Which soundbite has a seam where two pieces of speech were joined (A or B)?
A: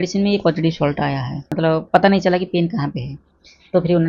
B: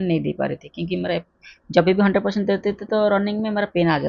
A